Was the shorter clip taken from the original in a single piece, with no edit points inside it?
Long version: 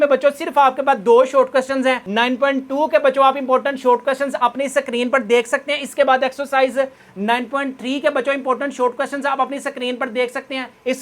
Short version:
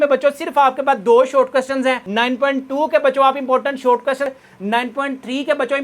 no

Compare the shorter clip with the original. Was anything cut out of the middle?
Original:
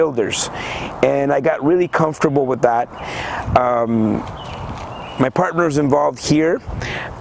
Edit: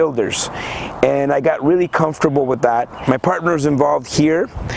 yes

